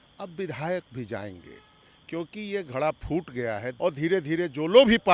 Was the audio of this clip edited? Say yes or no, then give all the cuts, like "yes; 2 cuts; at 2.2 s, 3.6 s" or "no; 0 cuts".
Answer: yes; 1 cut; at 3.6 s